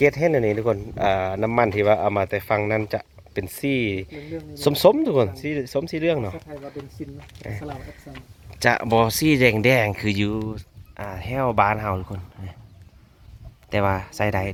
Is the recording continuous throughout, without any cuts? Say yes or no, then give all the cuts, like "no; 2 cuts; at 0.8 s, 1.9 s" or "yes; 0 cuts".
yes; 0 cuts